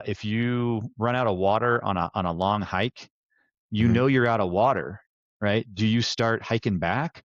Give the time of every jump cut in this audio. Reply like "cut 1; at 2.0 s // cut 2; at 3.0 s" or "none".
none